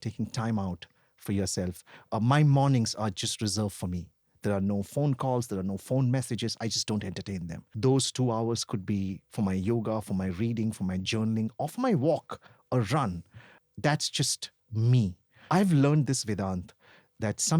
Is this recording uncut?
no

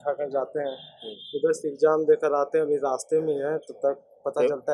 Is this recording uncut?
yes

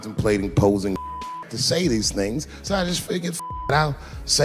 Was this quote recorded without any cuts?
no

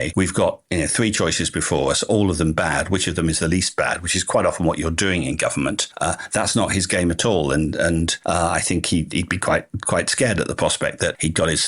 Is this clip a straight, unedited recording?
yes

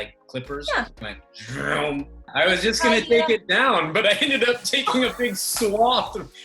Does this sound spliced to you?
yes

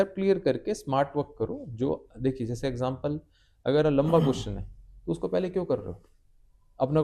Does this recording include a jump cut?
no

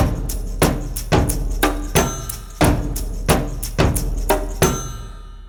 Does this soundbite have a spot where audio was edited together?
no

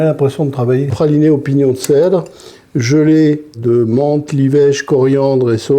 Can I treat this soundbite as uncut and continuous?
no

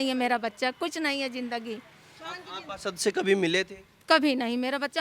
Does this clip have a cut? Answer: no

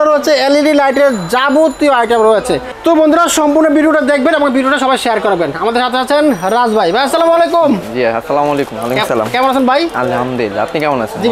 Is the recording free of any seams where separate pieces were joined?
yes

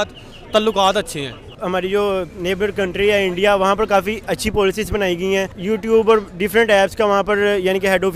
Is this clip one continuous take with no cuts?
no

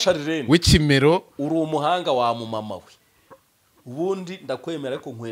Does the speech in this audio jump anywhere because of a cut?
no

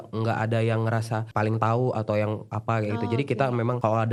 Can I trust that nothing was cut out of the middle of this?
yes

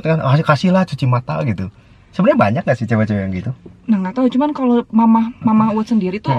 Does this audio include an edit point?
no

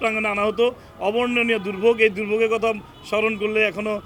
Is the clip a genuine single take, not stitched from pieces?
yes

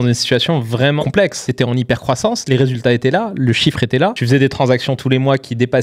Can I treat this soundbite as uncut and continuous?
no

